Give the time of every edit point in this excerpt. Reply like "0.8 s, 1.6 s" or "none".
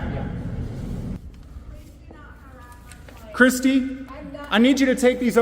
1.2 s